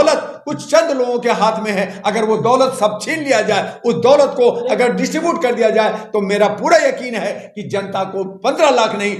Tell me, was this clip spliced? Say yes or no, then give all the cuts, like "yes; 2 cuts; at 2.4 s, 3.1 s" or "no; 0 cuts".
no; 0 cuts